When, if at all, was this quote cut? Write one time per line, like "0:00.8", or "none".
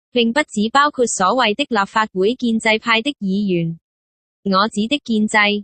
0:00.9